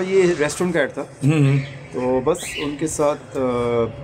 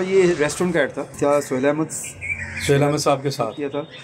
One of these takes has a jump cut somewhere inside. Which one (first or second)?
second